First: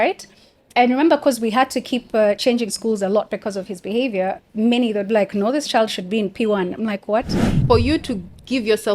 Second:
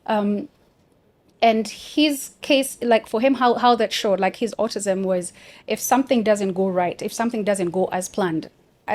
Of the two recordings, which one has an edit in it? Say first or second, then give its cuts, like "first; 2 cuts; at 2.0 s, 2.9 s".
first; 1 cut; at 7.6 s